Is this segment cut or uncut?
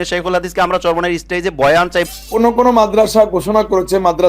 cut